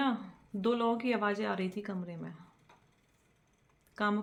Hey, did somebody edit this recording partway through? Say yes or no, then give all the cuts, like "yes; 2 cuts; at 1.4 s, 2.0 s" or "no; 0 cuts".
no; 0 cuts